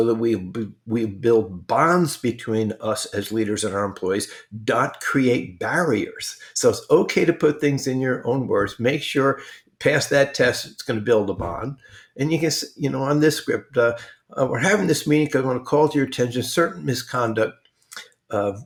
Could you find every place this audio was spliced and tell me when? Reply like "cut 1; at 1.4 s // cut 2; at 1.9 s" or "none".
none